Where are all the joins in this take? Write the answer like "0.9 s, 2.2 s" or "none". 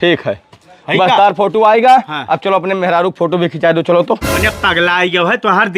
4.3 s